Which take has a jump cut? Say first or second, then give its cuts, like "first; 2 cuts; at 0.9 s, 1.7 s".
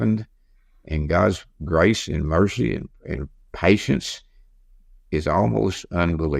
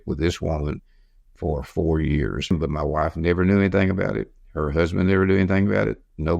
second; 1 cut; at 2.5 s